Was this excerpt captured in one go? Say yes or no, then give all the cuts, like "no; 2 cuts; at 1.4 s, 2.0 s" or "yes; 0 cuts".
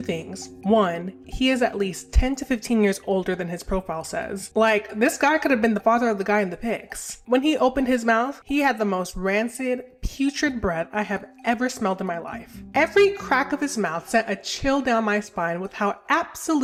yes; 0 cuts